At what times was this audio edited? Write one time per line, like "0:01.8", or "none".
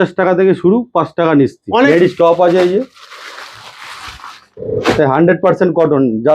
0:01.9